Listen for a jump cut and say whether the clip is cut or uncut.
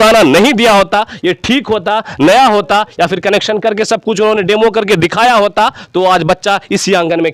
uncut